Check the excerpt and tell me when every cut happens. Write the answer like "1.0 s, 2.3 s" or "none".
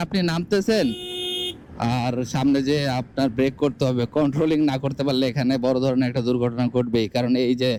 none